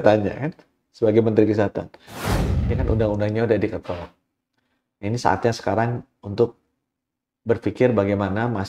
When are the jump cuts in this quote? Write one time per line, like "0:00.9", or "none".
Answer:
0:02.4